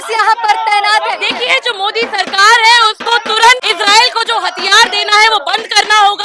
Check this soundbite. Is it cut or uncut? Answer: cut